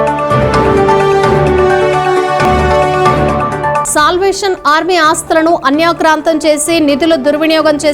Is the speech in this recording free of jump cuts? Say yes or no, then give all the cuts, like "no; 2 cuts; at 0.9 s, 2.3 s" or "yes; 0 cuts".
no; 1 cut; at 0.9 s